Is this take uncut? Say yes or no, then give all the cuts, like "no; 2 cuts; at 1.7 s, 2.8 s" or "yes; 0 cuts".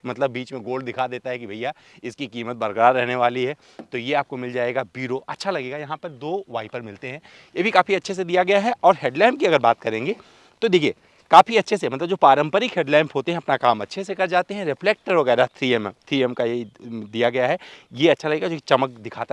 yes; 0 cuts